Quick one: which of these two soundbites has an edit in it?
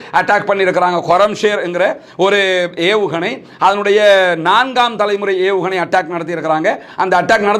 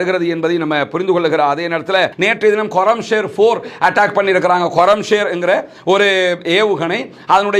second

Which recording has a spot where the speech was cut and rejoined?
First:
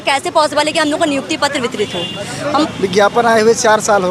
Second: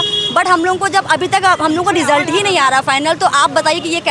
first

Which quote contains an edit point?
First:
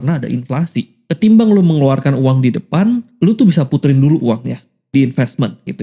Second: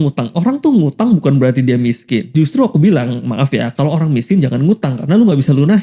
first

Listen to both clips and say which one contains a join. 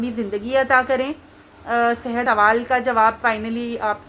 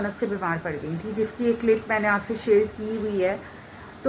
first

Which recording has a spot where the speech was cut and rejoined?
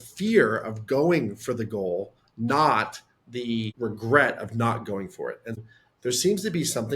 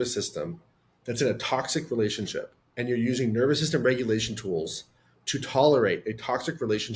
first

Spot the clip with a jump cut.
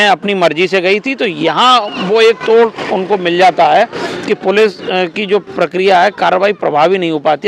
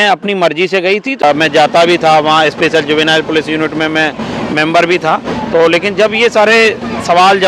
second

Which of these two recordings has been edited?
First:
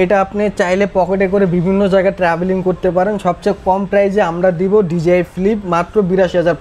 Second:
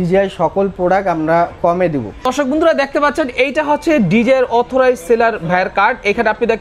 second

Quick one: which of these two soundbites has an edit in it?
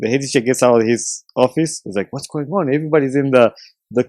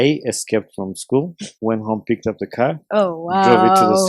second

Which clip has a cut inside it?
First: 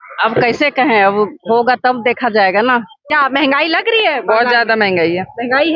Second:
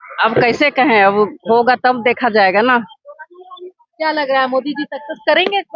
first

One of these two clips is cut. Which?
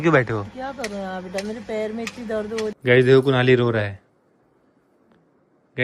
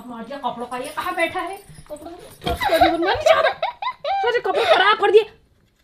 first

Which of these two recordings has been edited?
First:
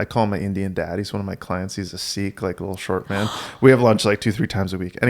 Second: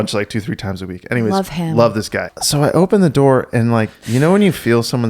second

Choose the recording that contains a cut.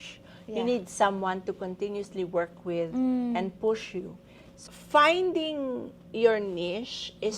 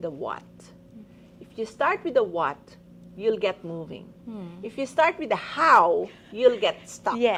first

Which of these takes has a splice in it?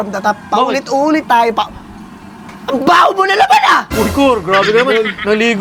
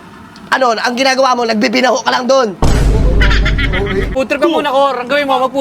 second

